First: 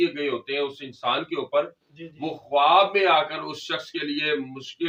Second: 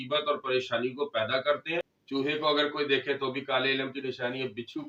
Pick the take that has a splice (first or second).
second